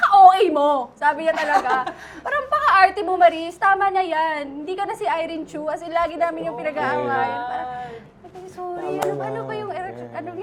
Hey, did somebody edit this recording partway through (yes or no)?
no